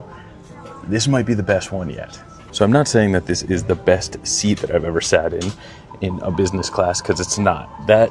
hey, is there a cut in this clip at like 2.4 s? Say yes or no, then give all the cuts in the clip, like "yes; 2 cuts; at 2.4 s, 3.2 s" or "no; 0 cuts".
no; 0 cuts